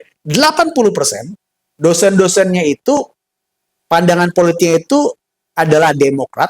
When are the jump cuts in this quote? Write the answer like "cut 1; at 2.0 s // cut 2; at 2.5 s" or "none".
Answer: none